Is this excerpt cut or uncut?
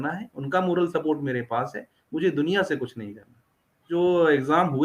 cut